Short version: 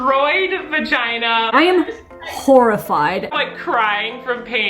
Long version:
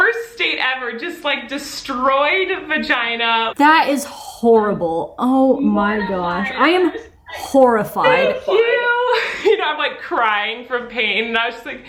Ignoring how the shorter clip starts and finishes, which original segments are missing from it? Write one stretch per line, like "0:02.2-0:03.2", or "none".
0:03.5-0:06.5
0:08.2-0:09.6